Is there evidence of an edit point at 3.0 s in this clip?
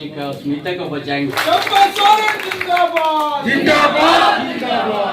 no; 1 cut; at 1.4 s

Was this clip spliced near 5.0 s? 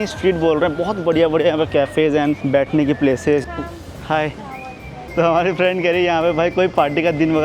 yes; 2 cuts; at 3.4 s, 5.0 s

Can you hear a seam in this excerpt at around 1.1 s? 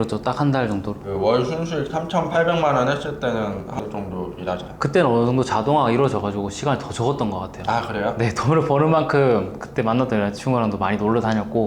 yes; 1 cut; at 1.1 s

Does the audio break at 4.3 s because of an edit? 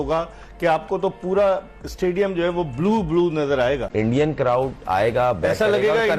yes; 1 cut; at 4.3 s

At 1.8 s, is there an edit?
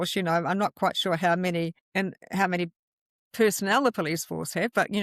yes; 1 cut; at 1.8 s

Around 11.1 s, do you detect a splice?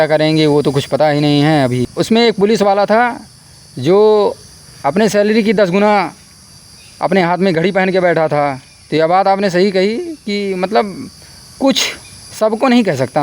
no; 1 cut; at 1.9 s

